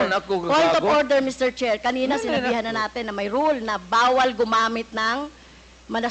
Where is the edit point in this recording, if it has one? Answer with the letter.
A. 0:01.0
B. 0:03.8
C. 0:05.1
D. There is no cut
D